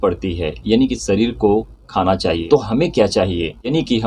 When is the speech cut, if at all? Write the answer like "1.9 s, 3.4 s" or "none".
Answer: 2.4 s